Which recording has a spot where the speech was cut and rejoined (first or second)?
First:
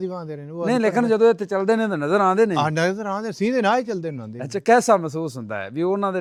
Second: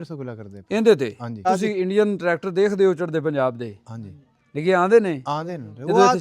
second